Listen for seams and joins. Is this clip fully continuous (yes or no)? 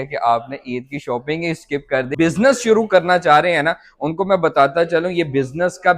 no